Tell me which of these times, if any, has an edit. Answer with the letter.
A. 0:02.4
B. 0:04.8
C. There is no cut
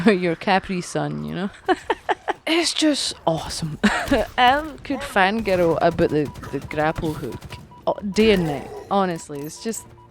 A